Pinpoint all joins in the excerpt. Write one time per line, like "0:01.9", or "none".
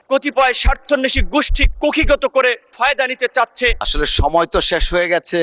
0:03.7